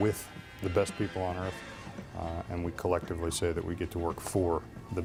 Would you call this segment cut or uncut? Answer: uncut